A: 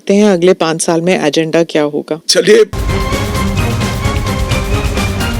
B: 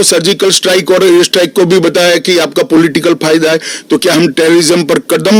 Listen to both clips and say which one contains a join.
A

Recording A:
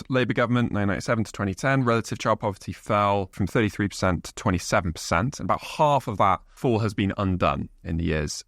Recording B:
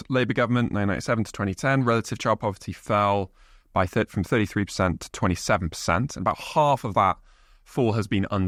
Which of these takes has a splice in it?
A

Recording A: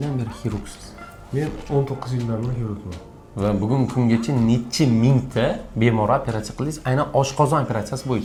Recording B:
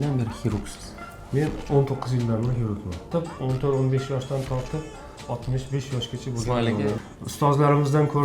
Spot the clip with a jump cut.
B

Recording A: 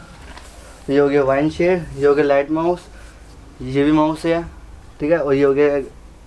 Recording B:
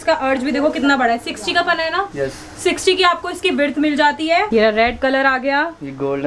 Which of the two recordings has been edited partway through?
B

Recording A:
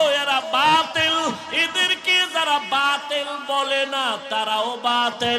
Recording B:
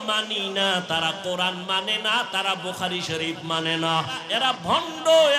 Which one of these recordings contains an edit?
B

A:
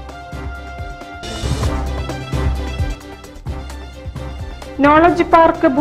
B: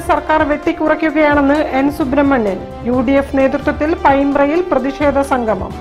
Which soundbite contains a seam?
A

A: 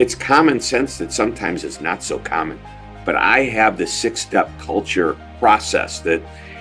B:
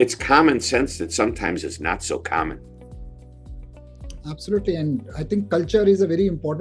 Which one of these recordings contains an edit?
A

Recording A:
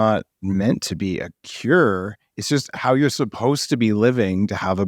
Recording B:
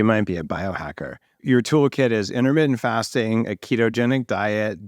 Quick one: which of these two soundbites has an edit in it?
B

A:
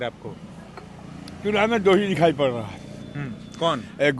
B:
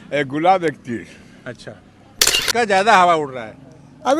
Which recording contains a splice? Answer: B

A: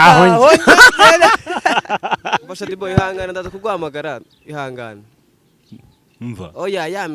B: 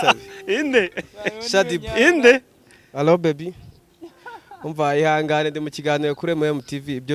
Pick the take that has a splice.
A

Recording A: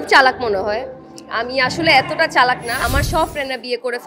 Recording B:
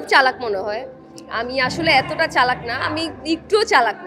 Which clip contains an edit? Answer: A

